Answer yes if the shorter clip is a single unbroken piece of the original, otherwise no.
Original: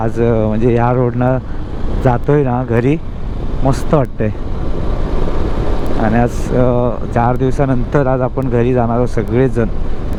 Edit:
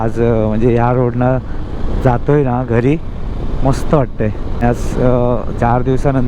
no